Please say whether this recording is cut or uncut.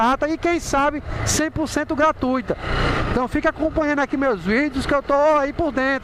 uncut